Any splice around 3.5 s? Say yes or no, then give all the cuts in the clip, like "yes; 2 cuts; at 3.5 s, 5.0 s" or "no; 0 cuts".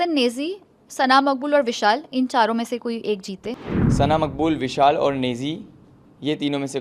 yes; 1 cut; at 3.5 s